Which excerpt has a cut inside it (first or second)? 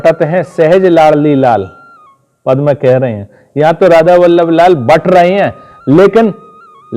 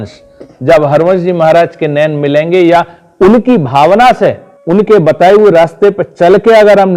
second